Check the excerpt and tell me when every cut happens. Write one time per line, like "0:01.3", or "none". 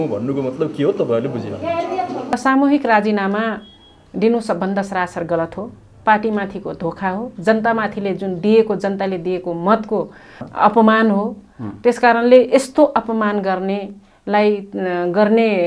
0:02.3